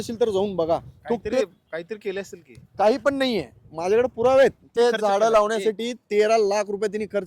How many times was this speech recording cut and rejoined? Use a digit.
1